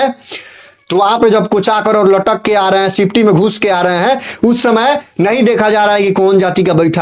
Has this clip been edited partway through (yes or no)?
no